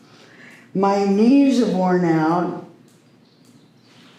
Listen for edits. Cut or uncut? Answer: uncut